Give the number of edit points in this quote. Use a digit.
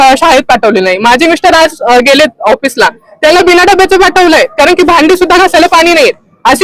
0